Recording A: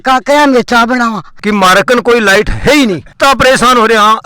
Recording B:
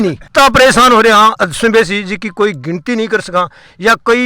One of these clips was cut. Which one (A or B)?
A